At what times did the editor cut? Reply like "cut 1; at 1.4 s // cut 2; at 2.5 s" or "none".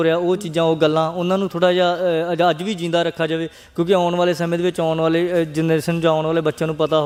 none

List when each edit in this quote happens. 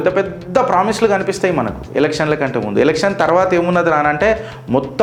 none

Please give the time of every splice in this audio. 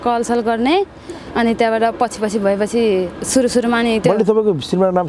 none

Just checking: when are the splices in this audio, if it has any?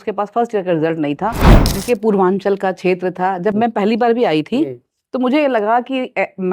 cut 1; at 1.5 s

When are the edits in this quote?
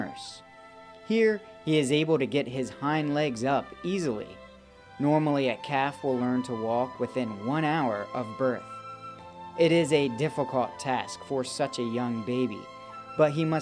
cut 1; at 2.0 s

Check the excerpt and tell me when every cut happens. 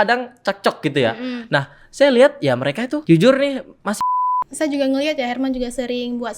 cut 1; at 3.0 s // cut 2; at 4.0 s

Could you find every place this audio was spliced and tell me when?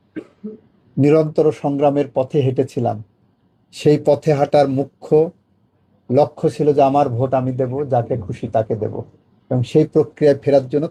none

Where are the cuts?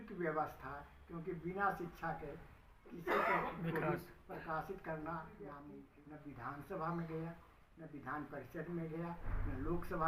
cut 1; at 5.7 s

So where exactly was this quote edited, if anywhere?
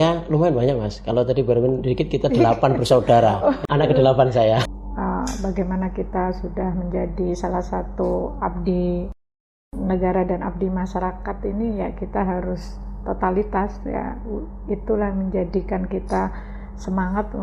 cut 1; at 3.6 s // cut 2; at 4.6 s

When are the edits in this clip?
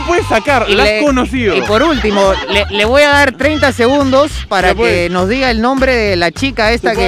none

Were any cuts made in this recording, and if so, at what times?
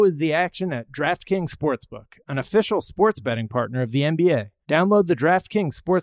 cut 1; at 4.5 s

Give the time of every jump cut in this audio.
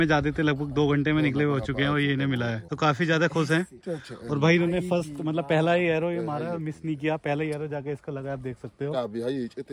cut 1; at 2.6 s

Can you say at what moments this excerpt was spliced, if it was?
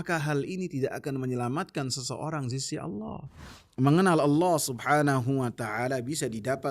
cut 1; at 3.6 s

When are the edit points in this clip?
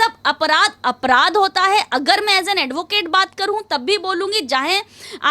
none

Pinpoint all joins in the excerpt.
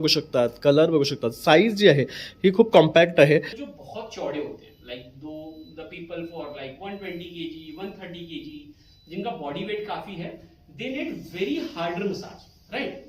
cut 1; at 3.5 s

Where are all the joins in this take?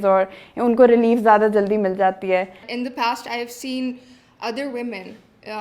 none

